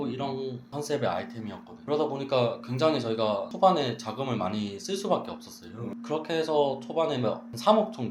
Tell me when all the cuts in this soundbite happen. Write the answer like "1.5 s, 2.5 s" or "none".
1.7 s, 3.5 s